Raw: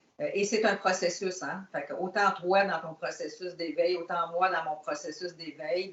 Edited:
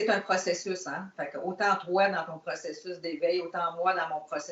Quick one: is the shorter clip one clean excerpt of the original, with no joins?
yes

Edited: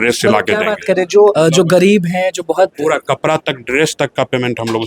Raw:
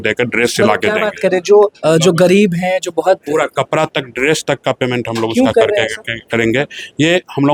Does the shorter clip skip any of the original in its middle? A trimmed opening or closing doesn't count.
yes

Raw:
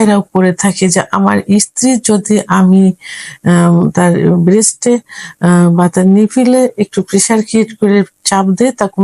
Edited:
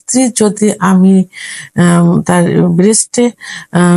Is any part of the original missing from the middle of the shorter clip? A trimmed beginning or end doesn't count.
no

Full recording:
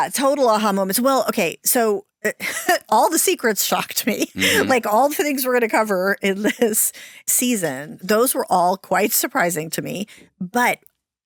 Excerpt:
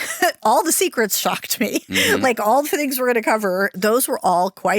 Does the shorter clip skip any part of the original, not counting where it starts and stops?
yes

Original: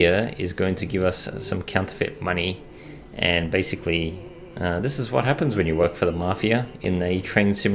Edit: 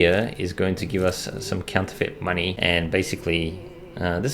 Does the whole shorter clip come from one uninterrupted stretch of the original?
no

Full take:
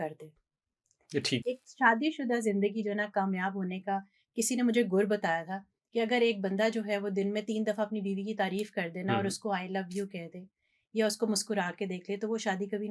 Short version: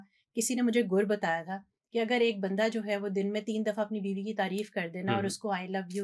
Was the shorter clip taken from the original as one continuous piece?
yes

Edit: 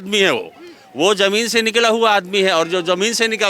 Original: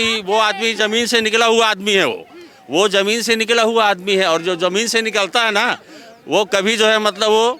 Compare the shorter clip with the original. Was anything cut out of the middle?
no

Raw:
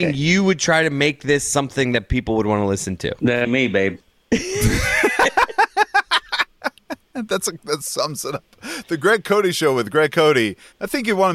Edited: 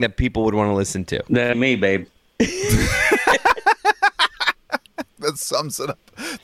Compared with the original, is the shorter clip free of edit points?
no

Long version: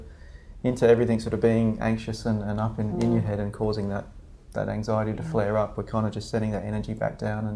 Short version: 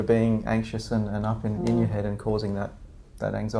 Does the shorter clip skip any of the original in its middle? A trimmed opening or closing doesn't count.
no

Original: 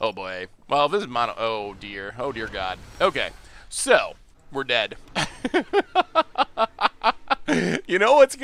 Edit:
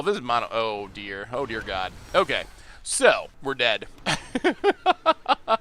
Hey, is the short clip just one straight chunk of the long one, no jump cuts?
no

